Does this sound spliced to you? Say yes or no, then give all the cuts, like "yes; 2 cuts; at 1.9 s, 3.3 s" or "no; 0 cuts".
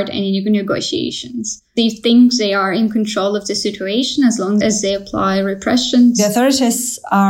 yes; 3 cuts; at 1.7 s, 4.6 s, 6.2 s